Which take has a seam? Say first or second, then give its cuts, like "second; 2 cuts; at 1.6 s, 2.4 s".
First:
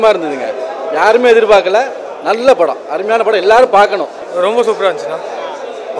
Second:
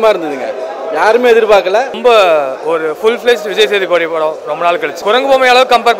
second; 2 cuts; at 2.0 s, 5.0 s